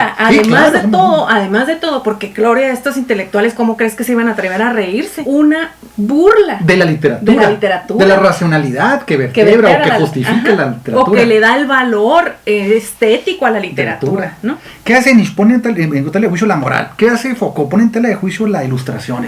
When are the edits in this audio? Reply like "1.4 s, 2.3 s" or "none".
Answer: 5.1 s, 14.7 s